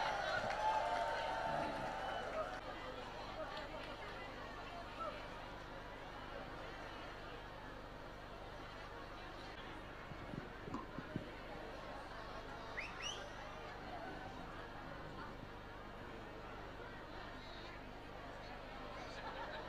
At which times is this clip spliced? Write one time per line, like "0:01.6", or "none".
0:02.6
0:09.6